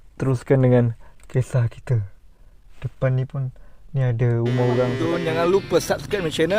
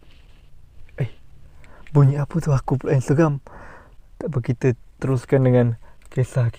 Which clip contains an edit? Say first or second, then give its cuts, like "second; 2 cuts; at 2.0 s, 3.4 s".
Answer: first; 1 cut; at 5.0 s